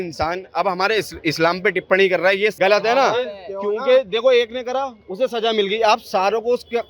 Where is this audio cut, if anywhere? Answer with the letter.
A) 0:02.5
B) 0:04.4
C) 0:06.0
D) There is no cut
A